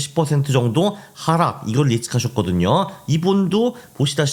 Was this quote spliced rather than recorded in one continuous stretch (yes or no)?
no